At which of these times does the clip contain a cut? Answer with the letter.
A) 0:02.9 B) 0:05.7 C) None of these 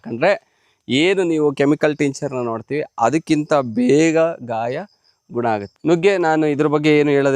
B